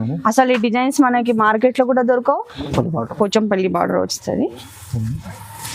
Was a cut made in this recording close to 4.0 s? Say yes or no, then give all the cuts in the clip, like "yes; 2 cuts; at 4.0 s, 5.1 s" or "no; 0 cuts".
no; 1 cut; at 2.7 s